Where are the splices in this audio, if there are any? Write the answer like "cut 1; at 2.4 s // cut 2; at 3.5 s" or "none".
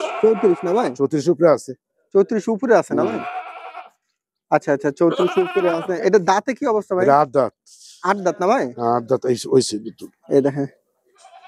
none